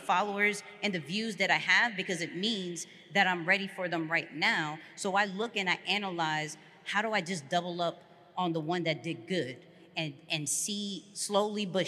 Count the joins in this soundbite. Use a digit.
0